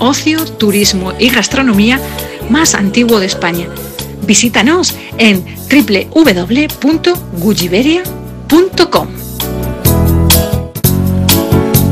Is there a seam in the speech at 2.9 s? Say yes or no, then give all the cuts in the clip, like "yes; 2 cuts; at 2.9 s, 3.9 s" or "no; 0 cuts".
no; 1 cut; at 10.8 s